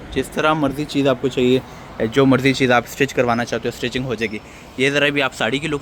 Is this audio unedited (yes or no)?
yes